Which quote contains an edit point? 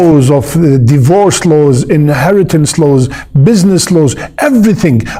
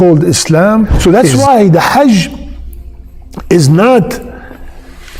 second; 1 cut; at 0.9 s

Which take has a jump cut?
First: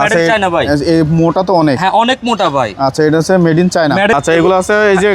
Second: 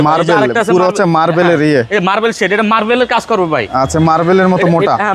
first; 1 cut; at 4.1 s

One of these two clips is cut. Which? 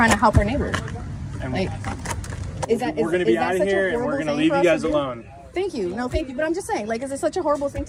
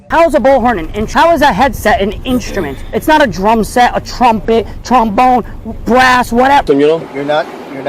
second; 2 cuts; at 1.0 s, 6.6 s

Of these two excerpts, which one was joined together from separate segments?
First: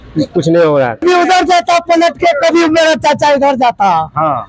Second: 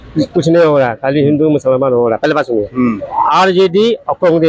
first; 1 cut; at 1.0 s

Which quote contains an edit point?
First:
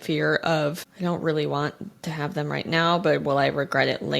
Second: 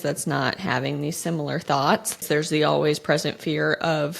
second; 1 cut; at 2.2 s

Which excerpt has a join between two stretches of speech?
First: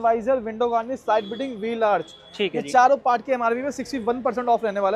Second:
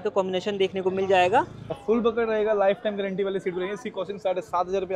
second; 1 cut; at 1.7 s

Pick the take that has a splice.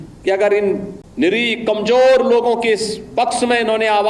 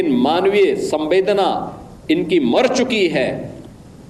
first; 1 cut; at 1.0 s

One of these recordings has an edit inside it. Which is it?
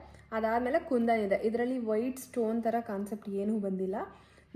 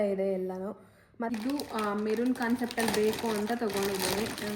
second; 1 cut; at 1.3 s

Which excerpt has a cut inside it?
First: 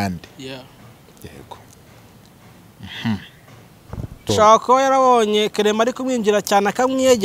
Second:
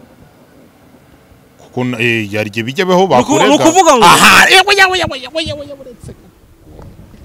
first; 1 cut; at 4.3 s

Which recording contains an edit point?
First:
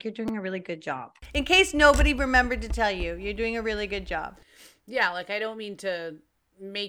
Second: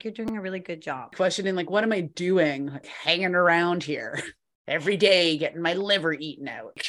second; 1 cut; at 1.1 s

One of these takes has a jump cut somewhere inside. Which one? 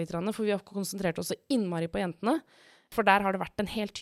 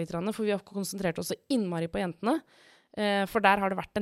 first; 1 cut; at 2.9 s

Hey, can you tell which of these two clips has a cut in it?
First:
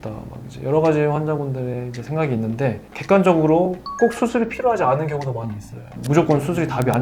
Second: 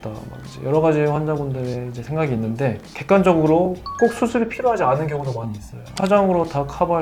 first; 1 cut; at 5.8 s

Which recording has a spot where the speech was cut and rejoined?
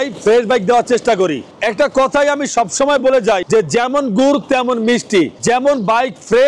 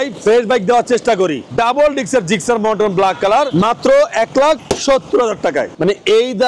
second; 2 cuts; at 1.5 s, 5.7 s

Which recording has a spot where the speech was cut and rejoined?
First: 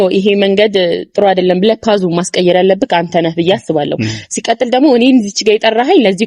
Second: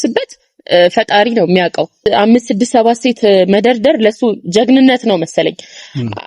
second; 1 cut; at 2.0 s

